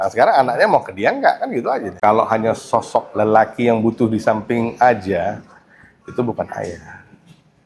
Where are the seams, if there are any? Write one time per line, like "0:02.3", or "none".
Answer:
0:01.9